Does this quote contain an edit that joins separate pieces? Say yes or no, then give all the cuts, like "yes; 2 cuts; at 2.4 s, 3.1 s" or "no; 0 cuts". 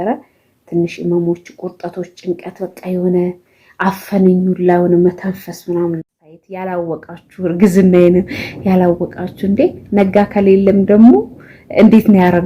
yes; 1 cut; at 6.1 s